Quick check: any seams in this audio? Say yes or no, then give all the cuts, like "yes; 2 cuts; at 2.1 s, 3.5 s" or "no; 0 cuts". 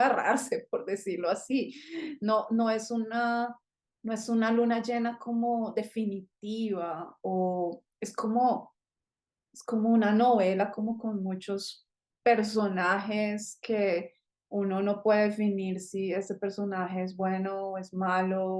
no; 0 cuts